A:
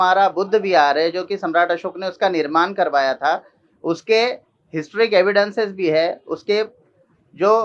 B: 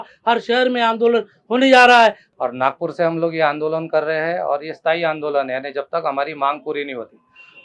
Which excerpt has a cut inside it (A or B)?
B